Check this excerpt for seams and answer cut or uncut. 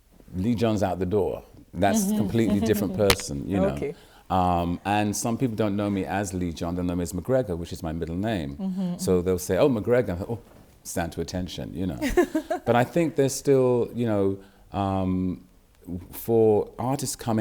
uncut